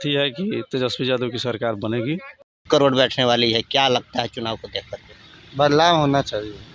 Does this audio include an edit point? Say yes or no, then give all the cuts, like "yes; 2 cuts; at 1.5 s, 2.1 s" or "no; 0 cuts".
yes; 1 cut; at 2.6 s